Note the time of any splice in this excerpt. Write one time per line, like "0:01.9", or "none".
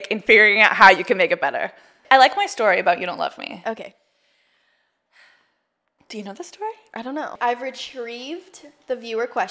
0:02.0
0:07.3